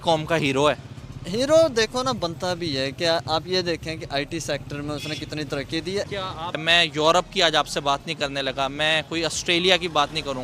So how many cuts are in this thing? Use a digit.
0